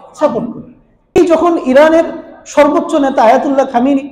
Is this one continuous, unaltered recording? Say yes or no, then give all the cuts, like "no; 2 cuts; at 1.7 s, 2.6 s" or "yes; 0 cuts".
no; 1 cut; at 1.2 s